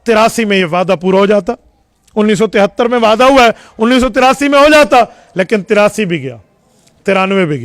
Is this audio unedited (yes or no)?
yes